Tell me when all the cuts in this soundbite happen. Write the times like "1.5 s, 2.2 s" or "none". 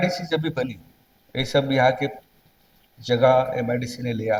none